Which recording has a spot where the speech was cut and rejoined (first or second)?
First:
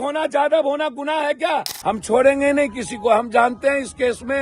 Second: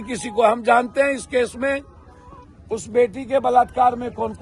first